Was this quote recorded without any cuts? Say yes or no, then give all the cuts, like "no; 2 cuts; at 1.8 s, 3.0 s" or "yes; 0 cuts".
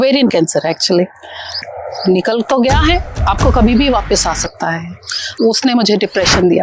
no; 2 cuts; at 1.6 s, 5.4 s